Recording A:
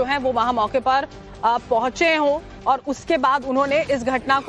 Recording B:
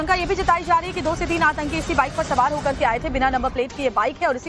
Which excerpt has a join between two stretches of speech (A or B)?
A